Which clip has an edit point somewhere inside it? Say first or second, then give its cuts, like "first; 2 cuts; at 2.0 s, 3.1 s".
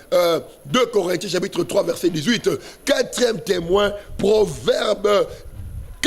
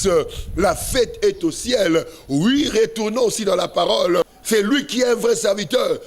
second; 1 cut; at 4.4 s